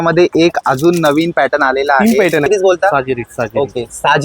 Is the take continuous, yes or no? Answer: no